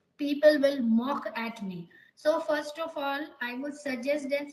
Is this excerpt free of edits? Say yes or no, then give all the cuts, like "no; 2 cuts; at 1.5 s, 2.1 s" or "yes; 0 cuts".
yes; 0 cuts